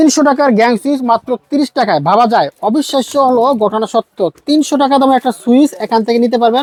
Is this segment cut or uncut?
uncut